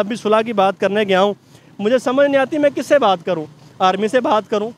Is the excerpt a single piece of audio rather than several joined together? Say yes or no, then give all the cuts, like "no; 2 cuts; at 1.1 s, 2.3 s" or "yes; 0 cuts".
yes; 0 cuts